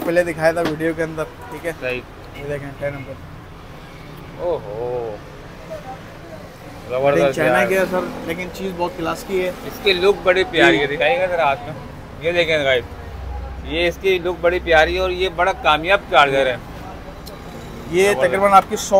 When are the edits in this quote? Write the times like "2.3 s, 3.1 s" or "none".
none